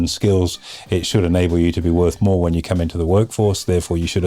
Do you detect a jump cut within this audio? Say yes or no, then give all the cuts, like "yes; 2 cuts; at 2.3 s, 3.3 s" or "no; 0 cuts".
no; 0 cuts